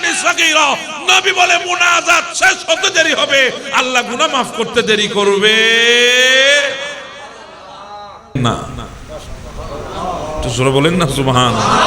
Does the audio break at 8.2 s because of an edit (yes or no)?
yes